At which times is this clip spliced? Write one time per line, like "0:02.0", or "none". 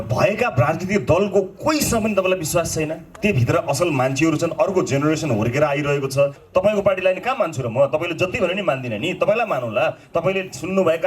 0:06.4